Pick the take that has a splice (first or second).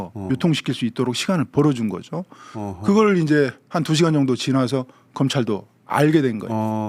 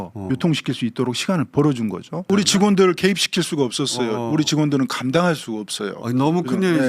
second